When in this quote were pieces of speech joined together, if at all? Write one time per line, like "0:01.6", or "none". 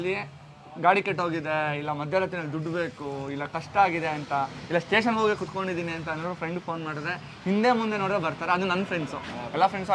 none